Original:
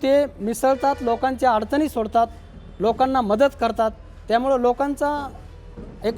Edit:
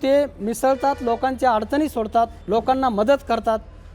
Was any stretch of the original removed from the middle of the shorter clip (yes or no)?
yes